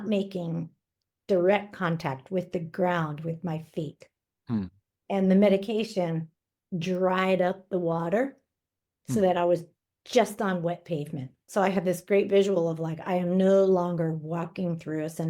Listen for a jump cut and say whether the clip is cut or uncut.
cut